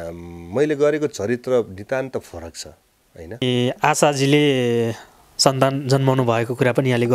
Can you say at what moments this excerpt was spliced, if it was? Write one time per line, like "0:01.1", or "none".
0:03.4